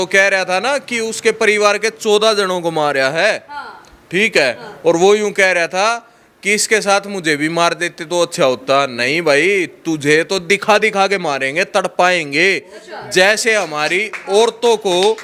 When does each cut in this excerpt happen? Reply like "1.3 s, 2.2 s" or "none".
none